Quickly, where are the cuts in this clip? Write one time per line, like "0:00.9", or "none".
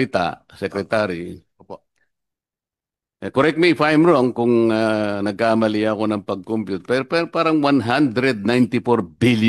none